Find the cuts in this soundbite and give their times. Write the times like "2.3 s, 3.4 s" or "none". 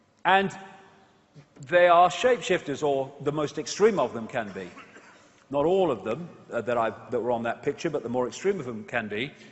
3.6 s